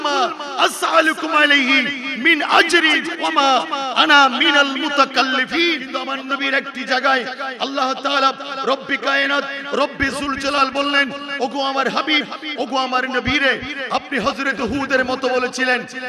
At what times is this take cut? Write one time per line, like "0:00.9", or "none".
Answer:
0:03.1
0:05.9